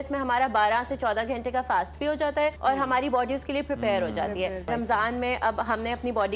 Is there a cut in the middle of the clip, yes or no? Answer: yes